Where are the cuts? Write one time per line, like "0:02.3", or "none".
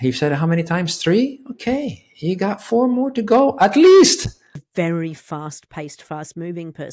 0:04.5